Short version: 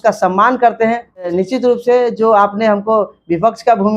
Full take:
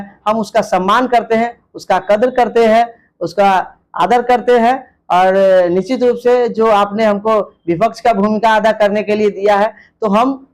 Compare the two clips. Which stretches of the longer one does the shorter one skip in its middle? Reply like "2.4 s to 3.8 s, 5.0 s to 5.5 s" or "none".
1.8 s to 5.7 s